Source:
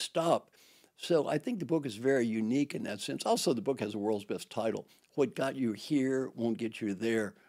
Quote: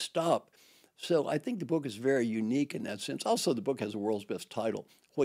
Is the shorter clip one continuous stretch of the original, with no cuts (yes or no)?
yes